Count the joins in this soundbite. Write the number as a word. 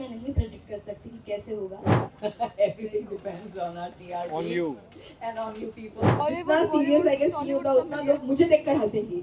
two